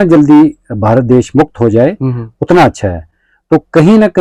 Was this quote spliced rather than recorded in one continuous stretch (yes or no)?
no